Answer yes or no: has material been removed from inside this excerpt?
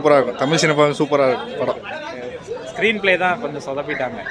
yes